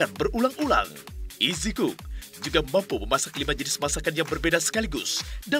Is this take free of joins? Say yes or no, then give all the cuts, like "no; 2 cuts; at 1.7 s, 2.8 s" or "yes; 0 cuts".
no; 1 cut; at 1.1 s